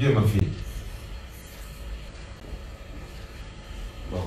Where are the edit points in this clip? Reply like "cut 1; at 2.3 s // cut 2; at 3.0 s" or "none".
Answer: cut 1; at 2.1 s